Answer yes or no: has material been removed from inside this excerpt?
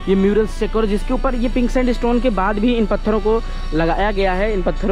no